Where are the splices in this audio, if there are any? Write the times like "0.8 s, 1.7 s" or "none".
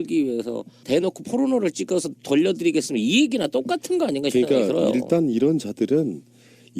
5.8 s